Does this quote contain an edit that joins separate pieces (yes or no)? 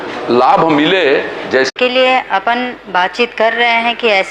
yes